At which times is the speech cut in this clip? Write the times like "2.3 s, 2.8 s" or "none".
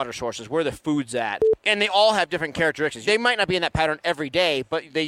1.5 s, 3.0 s